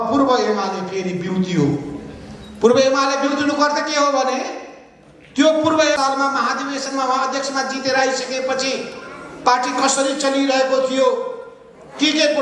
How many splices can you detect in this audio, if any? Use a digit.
1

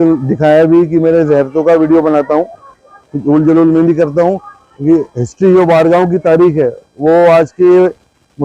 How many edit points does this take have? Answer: 0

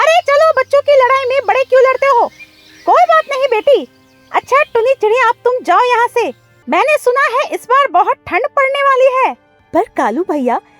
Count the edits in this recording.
2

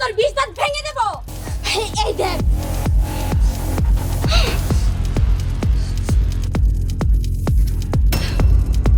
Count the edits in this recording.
1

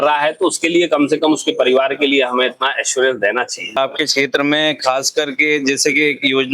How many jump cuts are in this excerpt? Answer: 1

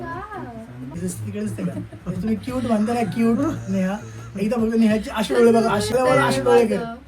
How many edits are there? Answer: 2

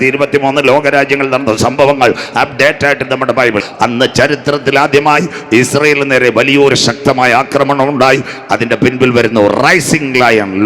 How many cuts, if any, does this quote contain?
1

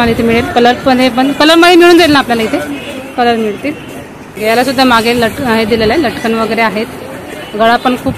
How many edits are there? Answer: 1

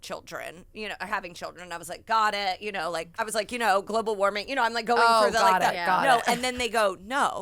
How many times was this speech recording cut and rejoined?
1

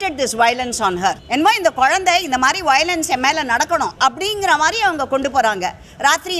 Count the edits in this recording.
2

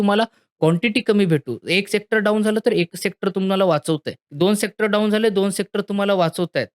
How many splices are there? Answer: 1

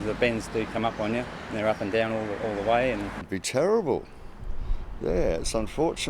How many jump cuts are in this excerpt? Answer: 1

